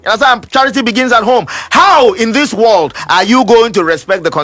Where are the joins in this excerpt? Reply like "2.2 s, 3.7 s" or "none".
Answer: none